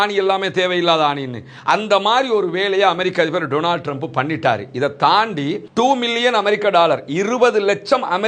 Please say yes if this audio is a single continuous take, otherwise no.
no